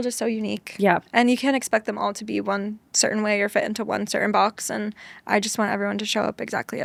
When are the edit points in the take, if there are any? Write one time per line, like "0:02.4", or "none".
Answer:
none